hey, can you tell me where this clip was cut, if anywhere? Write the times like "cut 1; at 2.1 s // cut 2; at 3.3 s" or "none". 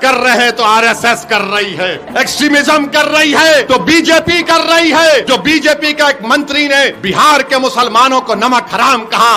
cut 1; at 2.0 s // cut 2; at 3.6 s // cut 3; at 5.2 s // cut 4; at 7.0 s